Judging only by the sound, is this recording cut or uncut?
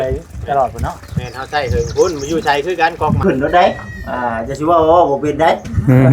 cut